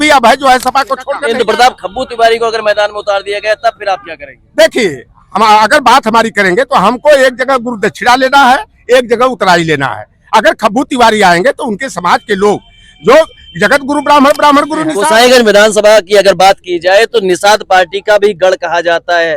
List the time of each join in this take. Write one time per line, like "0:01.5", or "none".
0:01.2
0:14.9